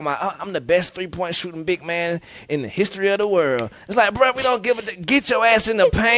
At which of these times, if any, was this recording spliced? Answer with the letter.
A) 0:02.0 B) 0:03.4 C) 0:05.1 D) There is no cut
D